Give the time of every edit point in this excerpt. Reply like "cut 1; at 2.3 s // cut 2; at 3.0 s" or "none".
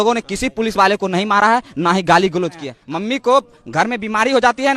cut 1; at 2.7 s